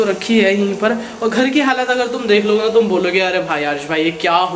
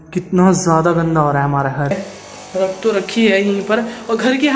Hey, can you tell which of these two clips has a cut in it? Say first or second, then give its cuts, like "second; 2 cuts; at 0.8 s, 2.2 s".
second; 1 cut; at 1.9 s